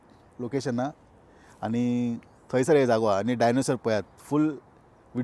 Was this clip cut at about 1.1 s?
no; 0 cuts

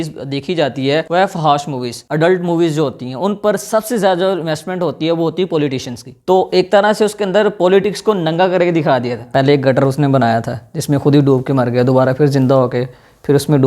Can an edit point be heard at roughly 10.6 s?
no; 3 cuts; at 1.1 s, 6.2 s, 9.2 s

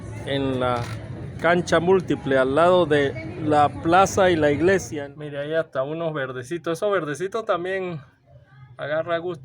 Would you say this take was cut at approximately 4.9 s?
yes; 1 cut; at 4.9 s

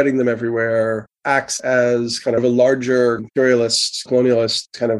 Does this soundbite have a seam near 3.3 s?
no; 1 cut; at 1.1 s

